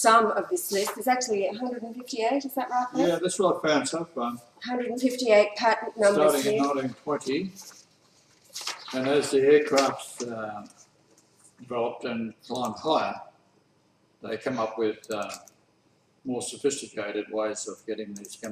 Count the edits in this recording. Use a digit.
0